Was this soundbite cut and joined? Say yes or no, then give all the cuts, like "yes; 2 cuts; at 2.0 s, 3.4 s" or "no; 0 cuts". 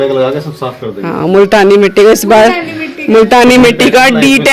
no; 0 cuts